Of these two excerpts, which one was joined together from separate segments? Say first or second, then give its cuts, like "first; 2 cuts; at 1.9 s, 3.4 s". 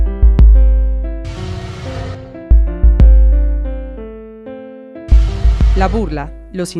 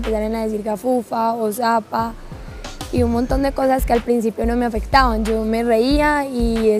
first; 1 cut; at 3.6 s